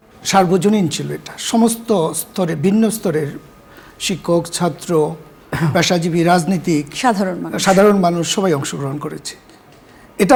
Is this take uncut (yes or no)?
yes